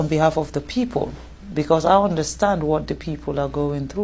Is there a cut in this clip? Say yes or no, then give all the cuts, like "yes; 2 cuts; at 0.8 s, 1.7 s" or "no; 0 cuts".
no; 0 cuts